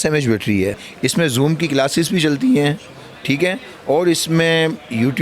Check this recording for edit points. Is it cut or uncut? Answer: cut